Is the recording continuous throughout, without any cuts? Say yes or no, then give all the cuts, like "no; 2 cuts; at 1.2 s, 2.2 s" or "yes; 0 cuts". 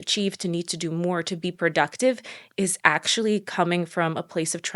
yes; 0 cuts